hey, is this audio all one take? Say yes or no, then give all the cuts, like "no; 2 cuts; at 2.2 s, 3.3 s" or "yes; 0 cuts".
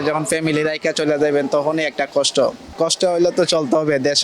no; 1 cut; at 2.6 s